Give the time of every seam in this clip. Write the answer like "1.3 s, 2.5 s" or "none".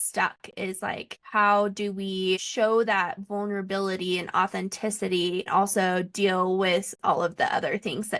1.1 s, 2.5 s, 5.5 s